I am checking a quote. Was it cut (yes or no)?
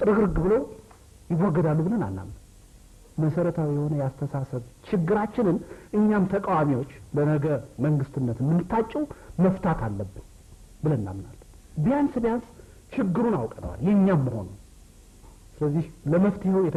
no